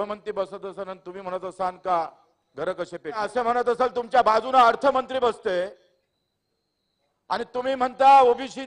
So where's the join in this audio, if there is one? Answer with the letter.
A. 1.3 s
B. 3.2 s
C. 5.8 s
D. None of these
B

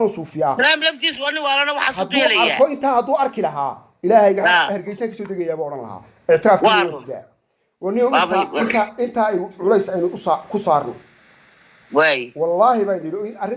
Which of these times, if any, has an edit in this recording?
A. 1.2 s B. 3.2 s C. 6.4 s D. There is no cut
D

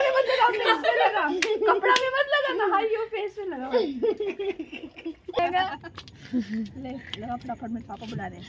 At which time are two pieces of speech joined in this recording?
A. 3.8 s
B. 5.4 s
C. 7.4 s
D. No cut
B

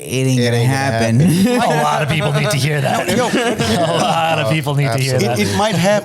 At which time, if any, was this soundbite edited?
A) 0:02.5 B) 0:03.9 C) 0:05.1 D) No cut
D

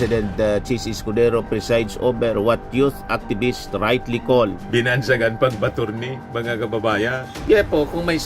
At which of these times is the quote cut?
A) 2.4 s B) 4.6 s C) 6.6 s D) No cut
B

